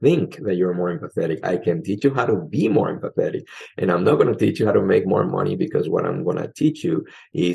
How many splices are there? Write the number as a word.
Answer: one